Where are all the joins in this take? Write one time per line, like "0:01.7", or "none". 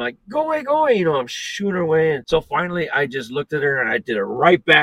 0:02.2